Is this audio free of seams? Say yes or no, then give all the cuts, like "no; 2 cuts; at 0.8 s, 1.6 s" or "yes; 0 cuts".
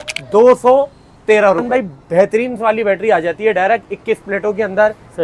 no; 1 cut; at 1.6 s